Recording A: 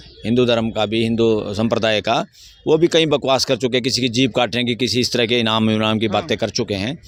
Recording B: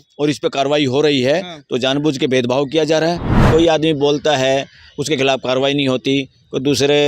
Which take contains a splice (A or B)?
B